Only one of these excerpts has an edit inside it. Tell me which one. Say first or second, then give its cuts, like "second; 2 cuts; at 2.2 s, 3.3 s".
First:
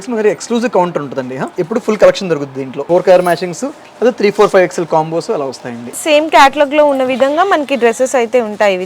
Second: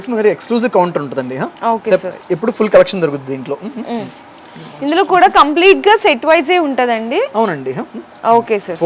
first; 3 cuts; at 1.5 s, 2.8 s, 6.0 s